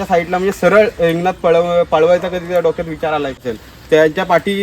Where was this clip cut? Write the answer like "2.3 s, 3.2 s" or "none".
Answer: 3.6 s